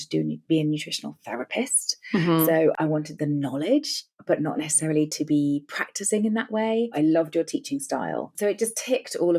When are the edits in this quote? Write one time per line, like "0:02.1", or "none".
0:02.7
0:06.9
0:08.3